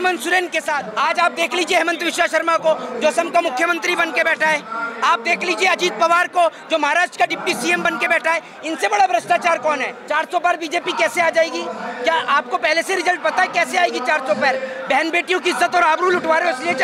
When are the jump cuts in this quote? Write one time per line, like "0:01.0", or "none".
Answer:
0:00.9
0:10.0